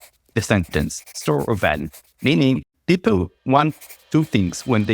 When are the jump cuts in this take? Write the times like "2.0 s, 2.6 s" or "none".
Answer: 3.3 s